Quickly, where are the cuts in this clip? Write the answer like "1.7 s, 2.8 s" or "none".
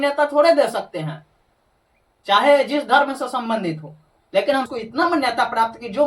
4.8 s